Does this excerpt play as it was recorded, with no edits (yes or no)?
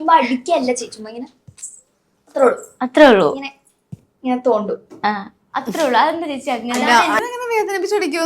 no